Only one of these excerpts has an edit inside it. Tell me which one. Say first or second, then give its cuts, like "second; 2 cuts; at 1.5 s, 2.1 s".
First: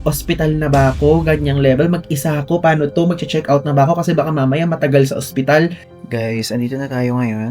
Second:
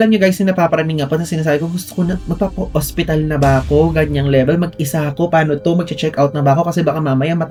first; 1 cut; at 5.9 s